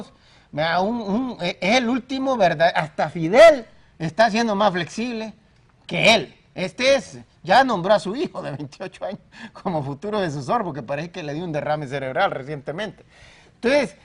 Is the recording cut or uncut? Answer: uncut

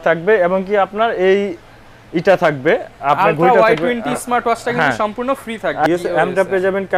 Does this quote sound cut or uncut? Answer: cut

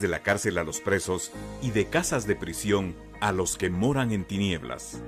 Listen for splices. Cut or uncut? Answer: uncut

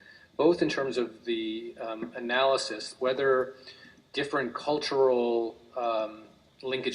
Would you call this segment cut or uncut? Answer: uncut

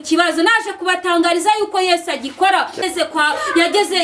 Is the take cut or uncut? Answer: cut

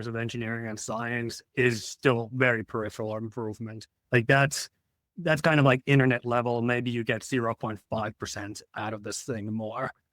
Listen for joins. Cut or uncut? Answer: uncut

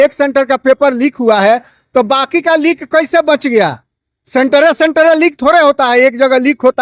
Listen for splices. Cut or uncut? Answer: uncut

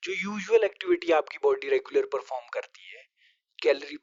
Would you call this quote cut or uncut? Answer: uncut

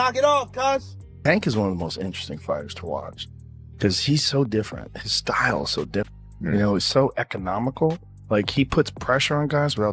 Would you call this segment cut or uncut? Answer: cut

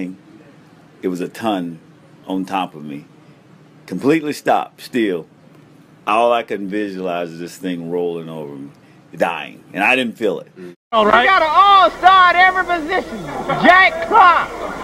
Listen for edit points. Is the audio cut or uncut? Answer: cut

